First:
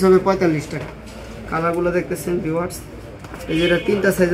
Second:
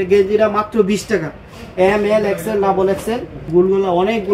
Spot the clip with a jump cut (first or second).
second